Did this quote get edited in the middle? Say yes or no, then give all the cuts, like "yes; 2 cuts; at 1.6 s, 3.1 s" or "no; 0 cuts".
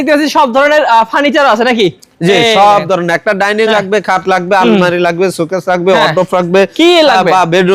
no; 0 cuts